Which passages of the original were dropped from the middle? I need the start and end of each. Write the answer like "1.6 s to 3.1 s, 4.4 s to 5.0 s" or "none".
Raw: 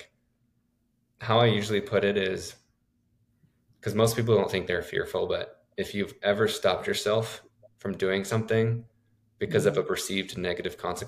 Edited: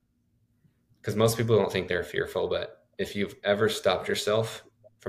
none